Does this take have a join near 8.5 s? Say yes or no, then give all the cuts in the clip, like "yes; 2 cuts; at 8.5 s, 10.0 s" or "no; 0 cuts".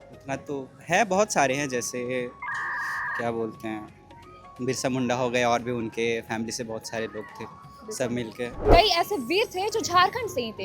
yes; 1 cut; at 8.5 s